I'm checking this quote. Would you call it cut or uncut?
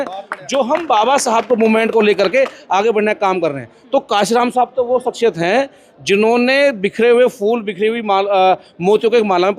uncut